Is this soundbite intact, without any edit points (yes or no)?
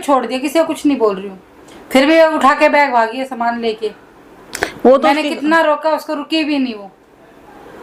yes